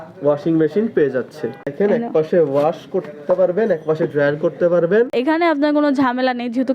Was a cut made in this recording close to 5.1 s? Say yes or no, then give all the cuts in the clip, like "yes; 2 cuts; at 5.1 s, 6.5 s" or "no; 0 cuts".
yes; 2 cuts; at 1.7 s, 5.1 s